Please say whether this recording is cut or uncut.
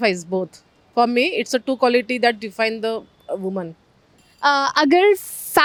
uncut